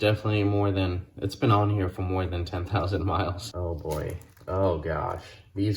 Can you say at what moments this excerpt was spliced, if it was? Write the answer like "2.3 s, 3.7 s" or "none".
3.5 s